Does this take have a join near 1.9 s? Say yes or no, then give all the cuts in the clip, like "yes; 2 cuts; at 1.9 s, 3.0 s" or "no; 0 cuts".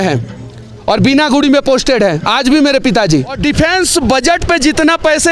no; 1 cut; at 3.4 s